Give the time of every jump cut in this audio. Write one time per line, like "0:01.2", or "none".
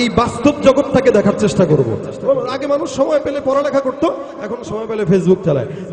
0:02.1

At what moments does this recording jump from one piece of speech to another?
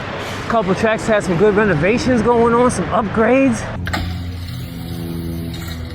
0:03.8

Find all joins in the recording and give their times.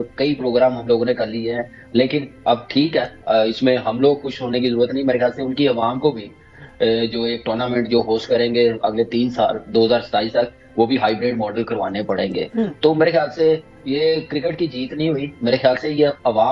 none

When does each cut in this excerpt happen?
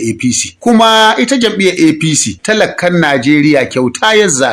none

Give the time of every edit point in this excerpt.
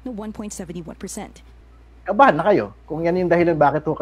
0:01.7

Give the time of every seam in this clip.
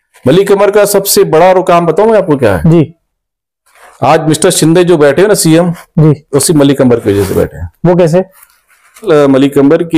0:09.0

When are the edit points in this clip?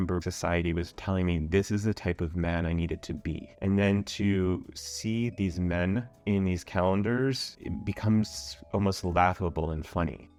none

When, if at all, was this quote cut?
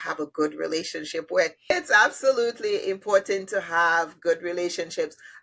0:01.7

